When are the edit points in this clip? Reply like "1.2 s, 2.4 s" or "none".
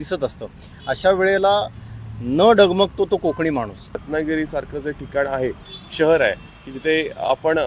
4.1 s